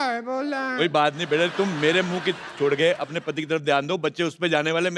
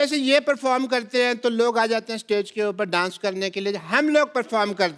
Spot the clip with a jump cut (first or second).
first